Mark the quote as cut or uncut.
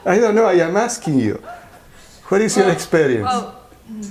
uncut